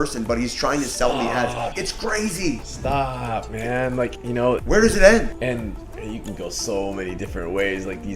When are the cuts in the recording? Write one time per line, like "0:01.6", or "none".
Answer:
0:01.7
0:02.7
0:04.4
0:05.4